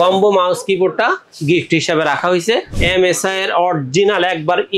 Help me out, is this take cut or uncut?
cut